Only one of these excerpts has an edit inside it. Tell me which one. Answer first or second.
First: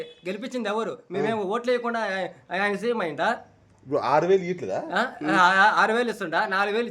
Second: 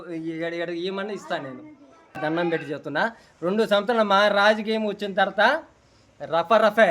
second